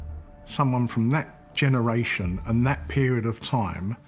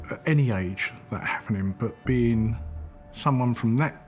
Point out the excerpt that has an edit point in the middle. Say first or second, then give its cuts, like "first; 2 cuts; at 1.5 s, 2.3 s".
second; 1 cut; at 1.8 s